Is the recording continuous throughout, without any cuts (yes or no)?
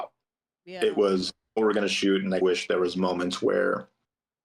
no